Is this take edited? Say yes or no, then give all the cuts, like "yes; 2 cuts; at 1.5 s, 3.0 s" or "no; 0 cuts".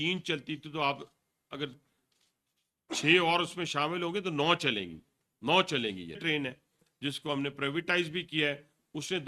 yes; 1 cut; at 6.2 s